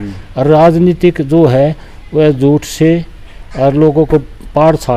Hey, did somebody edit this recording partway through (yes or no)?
no